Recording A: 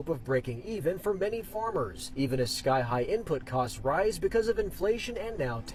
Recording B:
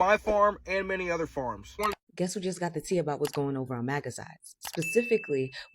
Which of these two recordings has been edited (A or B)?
B